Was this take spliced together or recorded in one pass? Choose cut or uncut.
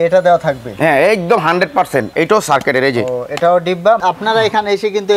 cut